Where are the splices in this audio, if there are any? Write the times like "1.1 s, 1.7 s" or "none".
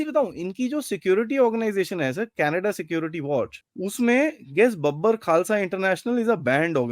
3.6 s

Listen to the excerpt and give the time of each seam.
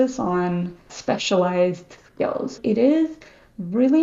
0.9 s, 2.6 s

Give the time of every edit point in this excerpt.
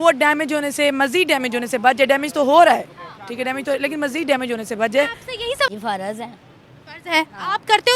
5.7 s

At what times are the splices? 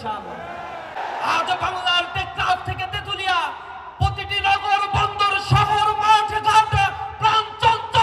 1.0 s

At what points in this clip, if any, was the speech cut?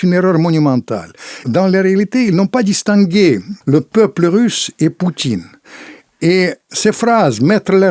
1.4 s, 3.5 s, 6.7 s

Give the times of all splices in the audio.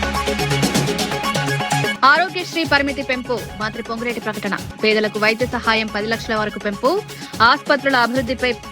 1.9 s

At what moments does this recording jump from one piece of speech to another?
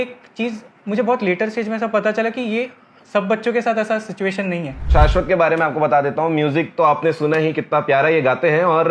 4.9 s

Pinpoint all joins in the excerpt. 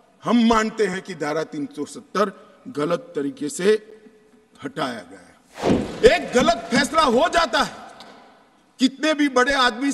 5.5 s

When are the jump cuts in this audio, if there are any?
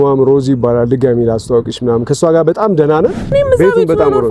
3.2 s

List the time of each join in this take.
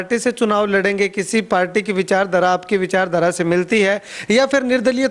none

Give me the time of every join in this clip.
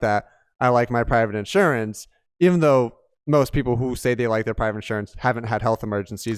none

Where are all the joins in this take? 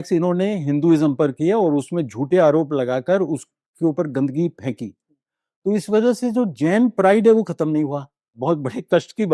8.4 s

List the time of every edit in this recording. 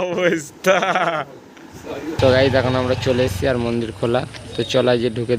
2.2 s

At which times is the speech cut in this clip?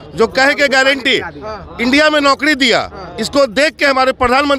none

